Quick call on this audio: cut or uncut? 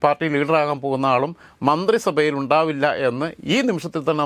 uncut